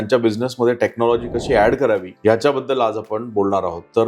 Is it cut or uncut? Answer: cut